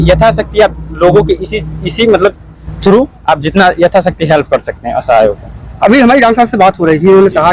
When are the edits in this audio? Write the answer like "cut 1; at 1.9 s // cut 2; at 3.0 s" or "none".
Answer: none